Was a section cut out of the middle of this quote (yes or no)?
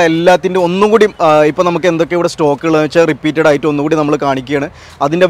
no